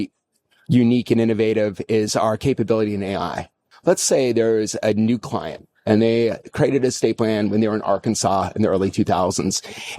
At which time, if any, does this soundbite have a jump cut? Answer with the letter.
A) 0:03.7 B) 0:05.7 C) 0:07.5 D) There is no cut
A